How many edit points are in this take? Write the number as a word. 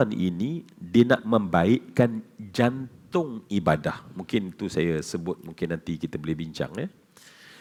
zero